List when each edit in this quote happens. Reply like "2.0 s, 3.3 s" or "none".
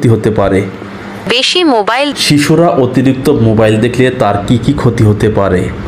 2.1 s